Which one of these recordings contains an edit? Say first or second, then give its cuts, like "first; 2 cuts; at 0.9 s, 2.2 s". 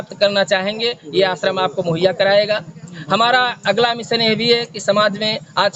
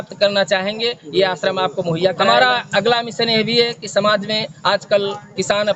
second; 1 cut; at 2.3 s